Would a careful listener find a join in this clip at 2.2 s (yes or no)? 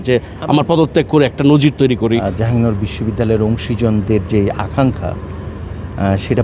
yes